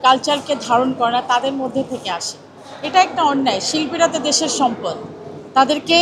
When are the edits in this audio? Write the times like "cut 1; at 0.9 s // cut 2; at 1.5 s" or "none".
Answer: none